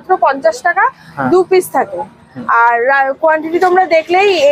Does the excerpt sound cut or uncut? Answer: uncut